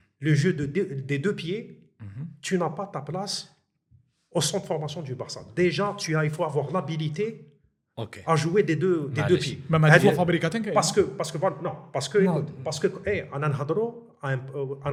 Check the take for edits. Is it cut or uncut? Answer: uncut